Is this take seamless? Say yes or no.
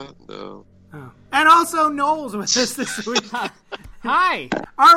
no